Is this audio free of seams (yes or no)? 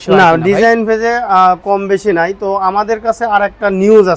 yes